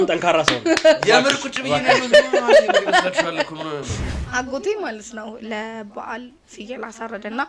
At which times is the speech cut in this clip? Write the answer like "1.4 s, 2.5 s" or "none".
4.1 s